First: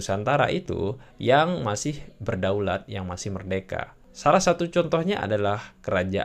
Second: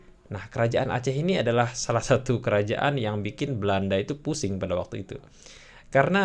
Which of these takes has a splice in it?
first; 1 cut; at 4.0 s

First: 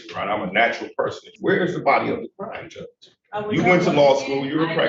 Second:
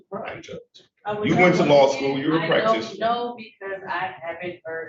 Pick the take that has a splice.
first; 1 cut; at 1.3 s

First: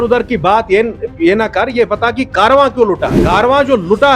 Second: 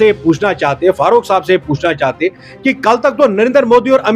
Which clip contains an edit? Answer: first; 1 cut; at 3.2 s

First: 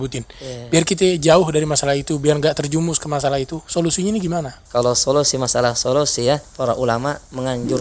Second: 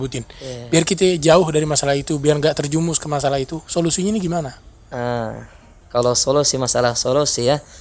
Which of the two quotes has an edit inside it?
first; 2 cuts; at 4.6 s, 7.0 s

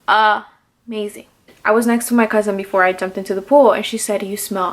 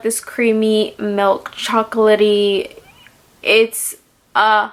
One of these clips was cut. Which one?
first; 1 cut; at 1.5 s

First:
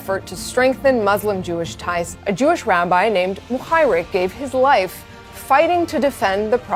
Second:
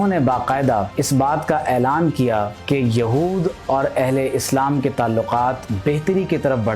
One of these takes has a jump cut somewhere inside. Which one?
second; 2 cuts; at 0.9 s, 5.7 s

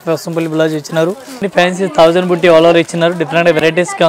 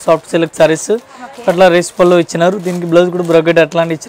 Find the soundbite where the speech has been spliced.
first; 1 cut; at 1.5 s

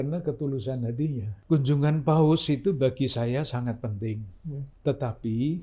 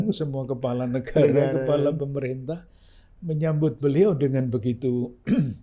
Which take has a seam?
first; 2 cuts; at 1.3 s, 4.7 s

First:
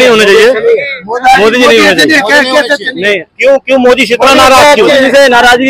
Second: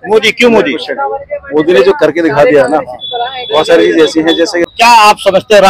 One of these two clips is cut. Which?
second; 1 cut; at 4.6 s

